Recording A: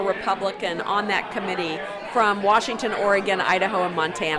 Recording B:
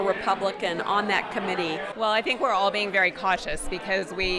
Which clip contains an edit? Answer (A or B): B